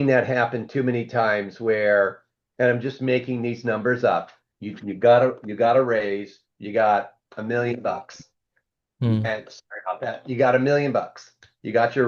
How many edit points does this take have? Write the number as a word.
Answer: zero